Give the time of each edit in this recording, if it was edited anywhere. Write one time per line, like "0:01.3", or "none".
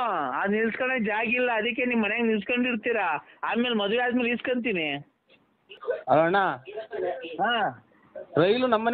0:05.7